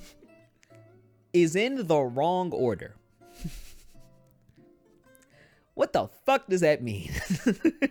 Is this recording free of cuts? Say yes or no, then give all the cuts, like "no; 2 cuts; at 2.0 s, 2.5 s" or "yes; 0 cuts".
yes; 0 cuts